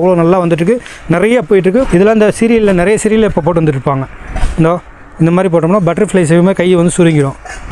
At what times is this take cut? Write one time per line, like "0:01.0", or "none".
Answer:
0:01.9